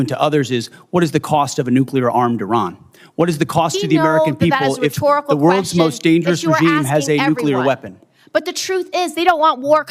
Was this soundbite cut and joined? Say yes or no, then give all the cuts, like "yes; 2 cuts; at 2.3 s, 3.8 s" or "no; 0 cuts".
yes; 1 cut; at 8.9 s